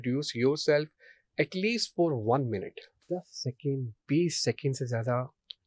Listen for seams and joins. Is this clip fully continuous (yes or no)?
no